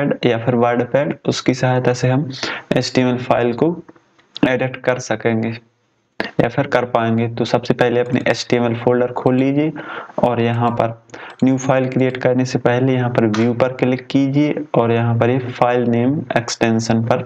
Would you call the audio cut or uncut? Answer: uncut